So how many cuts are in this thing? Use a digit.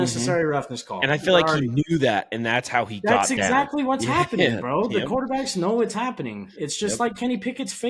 0